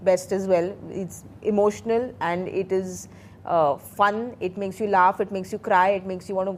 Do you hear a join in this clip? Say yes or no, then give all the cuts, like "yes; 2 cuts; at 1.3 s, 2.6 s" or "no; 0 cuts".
no; 0 cuts